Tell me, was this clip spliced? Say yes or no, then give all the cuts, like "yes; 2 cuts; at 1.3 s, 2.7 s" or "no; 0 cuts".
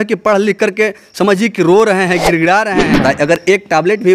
yes; 1 cut; at 2.9 s